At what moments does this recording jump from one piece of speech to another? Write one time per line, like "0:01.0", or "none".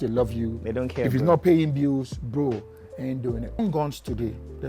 0:03.6